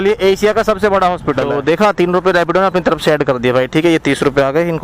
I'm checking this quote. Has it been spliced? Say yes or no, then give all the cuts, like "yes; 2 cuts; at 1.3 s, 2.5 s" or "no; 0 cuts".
yes; 1 cut; at 1.5 s